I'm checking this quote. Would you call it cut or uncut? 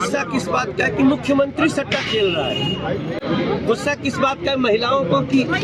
uncut